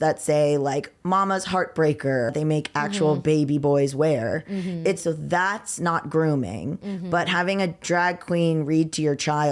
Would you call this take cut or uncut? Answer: cut